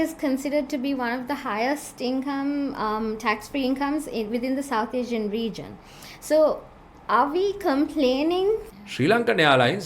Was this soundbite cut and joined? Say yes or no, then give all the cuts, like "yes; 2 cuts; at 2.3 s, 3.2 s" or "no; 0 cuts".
yes; 1 cut; at 8.6 s